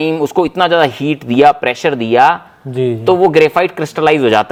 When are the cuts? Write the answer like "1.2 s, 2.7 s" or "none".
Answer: none